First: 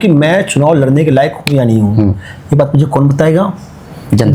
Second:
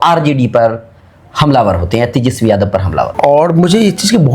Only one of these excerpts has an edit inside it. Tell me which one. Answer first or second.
second